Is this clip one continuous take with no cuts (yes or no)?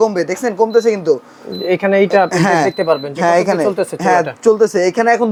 yes